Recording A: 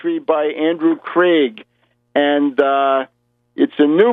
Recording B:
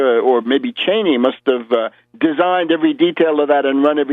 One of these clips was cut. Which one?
B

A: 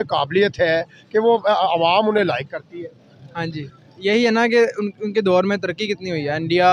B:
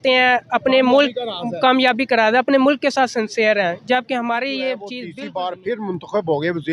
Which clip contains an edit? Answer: B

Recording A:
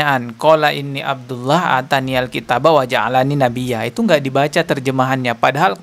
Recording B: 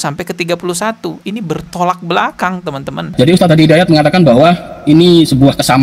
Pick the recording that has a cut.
B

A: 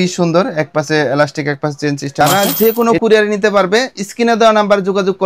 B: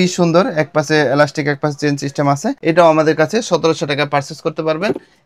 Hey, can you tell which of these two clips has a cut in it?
A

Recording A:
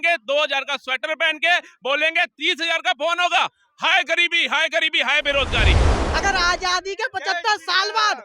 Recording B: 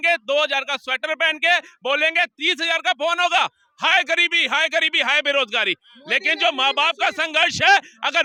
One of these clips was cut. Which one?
A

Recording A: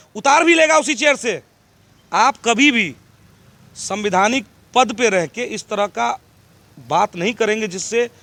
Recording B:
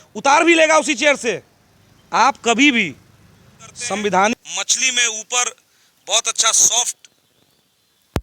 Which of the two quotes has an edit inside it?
B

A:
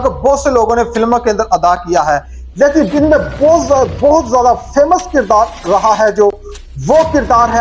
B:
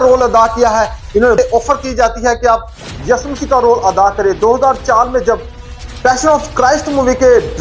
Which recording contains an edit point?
B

